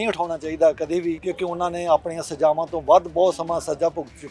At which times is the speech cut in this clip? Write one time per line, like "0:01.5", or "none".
0:01.2